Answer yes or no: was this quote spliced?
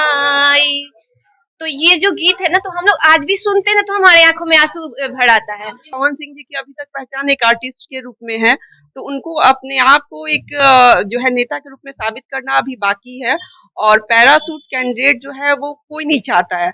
yes